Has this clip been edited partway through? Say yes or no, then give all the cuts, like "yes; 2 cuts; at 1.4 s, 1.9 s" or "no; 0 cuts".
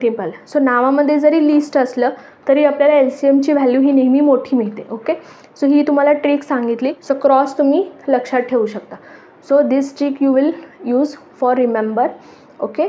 yes; 1 cut; at 7.0 s